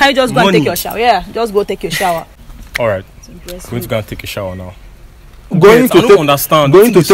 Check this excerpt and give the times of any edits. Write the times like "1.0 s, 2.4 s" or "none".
2.4 s, 5.5 s